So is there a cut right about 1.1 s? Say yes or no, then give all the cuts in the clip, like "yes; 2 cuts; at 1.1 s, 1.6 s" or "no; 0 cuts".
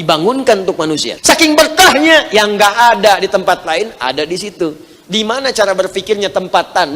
yes; 1 cut; at 1.1 s